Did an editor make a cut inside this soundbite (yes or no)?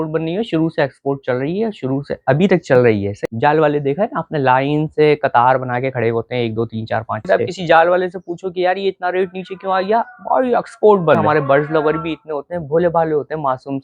yes